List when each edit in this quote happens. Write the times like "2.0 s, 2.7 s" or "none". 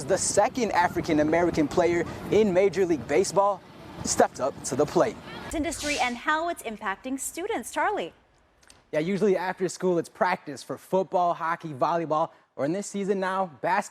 5.5 s